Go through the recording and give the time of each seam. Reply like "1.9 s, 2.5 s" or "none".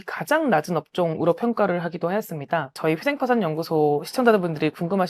2.7 s